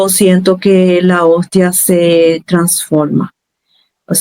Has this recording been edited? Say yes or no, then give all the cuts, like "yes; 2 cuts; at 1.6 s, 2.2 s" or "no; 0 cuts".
no; 0 cuts